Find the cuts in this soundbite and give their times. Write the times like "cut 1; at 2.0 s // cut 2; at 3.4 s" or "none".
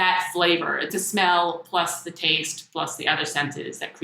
cut 1; at 0.9 s